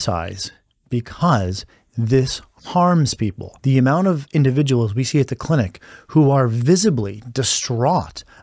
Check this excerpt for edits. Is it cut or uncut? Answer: cut